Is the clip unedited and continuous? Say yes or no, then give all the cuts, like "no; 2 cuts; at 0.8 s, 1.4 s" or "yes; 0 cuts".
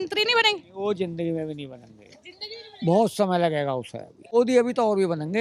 no; 1 cut; at 4.3 s